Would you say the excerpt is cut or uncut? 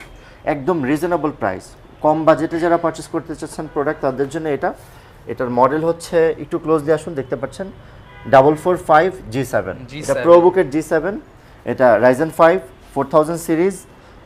uncut